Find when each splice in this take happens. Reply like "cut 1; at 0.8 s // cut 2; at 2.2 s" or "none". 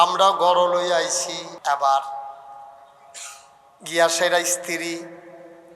cut 1; at 1.4 s